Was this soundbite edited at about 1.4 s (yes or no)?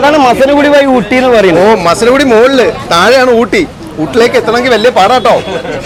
no